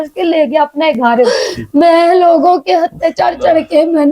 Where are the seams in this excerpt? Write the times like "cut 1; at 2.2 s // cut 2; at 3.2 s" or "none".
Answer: cut 1; at 1.3 s